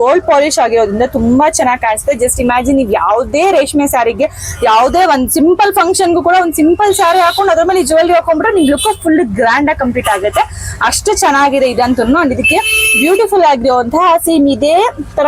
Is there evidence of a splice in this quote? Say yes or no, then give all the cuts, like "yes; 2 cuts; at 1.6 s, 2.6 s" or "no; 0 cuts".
no; 0 cuts